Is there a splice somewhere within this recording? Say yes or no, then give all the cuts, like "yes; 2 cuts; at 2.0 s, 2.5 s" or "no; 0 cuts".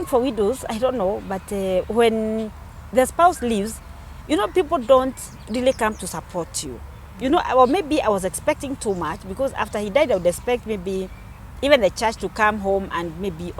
no; 0 cuts